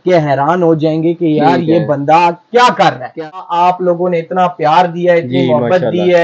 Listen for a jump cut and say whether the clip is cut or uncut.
cut